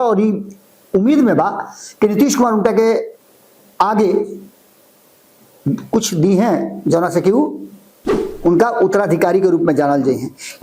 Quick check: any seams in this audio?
no; 0 cuts

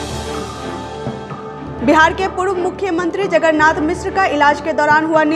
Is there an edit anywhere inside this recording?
yes; 1 cut; at 1.5 s

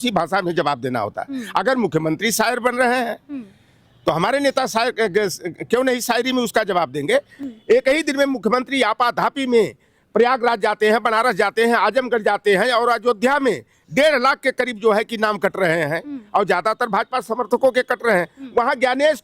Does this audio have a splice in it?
yes; 1 cut; at 7.4 s

